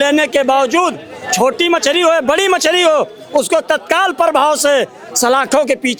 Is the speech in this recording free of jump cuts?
yes; 0 cuts

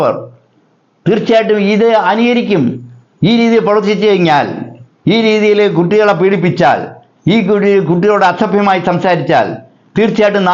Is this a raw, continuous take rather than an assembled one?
yes; 0 cuts

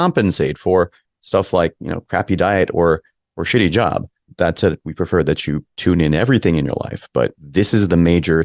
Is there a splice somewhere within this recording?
yes; 3 cuts; at 4.3 s, 5.7 s, 7.4 s

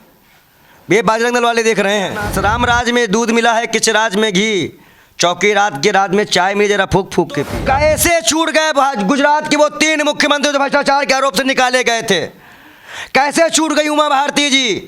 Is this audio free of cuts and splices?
no; 2 cuts; at 2.3 s, 7.5 s

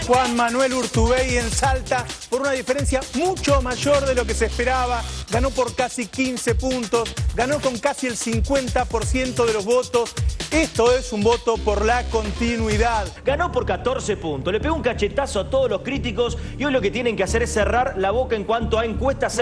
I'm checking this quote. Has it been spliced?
yes; 1 cut; at 13.1 s

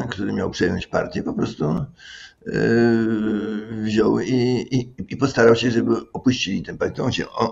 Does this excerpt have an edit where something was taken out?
no; 0 cuts

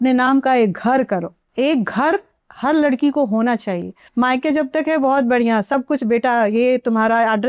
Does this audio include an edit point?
yes; 2 cuts; at 1.4 s, 4.0 s

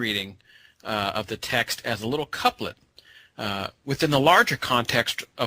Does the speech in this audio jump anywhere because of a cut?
yes; 1 cut; at 3.8 s

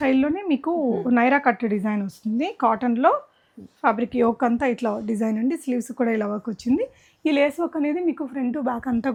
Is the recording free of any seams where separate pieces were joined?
yes; 0 cuts

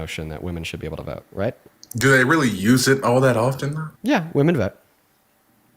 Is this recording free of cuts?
no; 2 cuts; at 1.7 s, 3.8 s

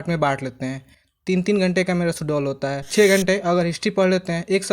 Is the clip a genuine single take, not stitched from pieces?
no; 1 cut; at 2.8 s

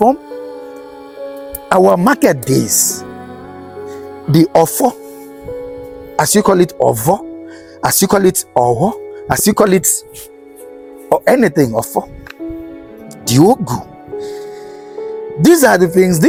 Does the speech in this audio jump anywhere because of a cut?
no; 0 cuts

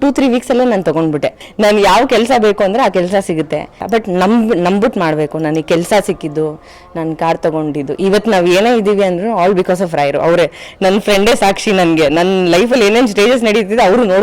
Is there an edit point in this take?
yes; 2 cuts; at 1.4 s, 3.8 s

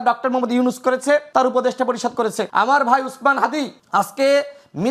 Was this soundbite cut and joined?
yes; 3 cuts; at 1.3 s, 2.4 s, 3.8 s

